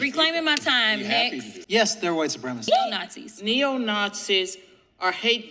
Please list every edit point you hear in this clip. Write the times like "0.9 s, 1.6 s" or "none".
1.5 s, 2.9 s